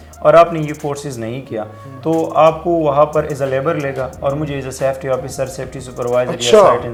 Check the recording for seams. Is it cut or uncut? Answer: uncut